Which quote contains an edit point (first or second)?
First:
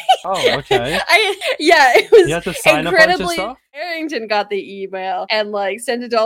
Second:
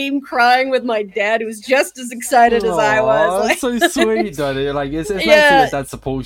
first